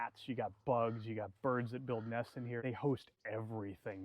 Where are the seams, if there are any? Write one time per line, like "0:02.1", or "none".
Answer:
0:02.6